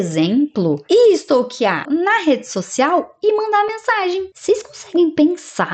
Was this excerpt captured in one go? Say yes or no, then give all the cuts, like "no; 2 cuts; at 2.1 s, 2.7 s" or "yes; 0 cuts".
no; 2 cuts; at 1.8 s, 4.3 s